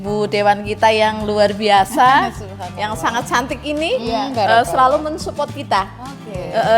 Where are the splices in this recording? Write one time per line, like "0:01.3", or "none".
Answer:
none